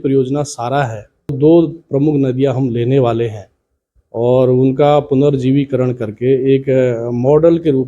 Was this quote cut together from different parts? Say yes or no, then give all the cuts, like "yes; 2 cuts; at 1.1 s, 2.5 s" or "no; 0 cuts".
yes; 1 cut; at 1.4 s